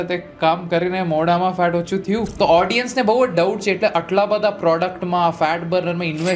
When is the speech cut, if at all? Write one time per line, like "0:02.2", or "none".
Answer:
0:02.3